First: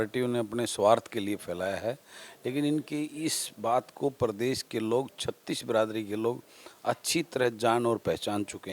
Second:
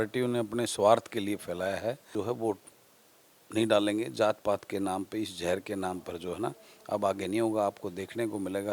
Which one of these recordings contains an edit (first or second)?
second